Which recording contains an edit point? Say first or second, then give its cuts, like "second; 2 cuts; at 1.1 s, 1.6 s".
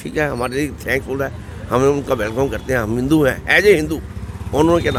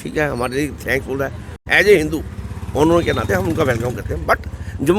second; 1 cut; at 1.6 s